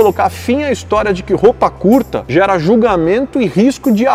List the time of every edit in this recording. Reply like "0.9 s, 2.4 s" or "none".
none